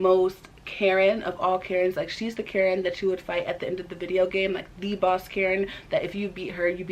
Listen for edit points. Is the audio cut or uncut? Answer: uncut